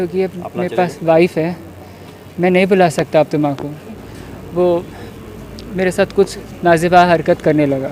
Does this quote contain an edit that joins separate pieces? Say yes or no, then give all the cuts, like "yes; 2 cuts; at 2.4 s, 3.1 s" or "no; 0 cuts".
yes; 1 cut; at 4.1 s